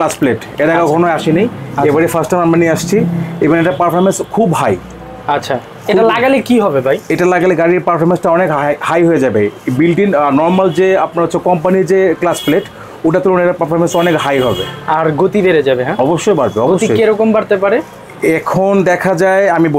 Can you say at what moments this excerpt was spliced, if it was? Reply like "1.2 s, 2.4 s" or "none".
none